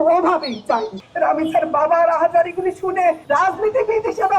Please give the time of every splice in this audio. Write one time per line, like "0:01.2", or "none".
0:01.0
0:03.2